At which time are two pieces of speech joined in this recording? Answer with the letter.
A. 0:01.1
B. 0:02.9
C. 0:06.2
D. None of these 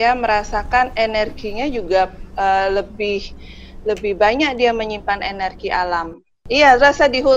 C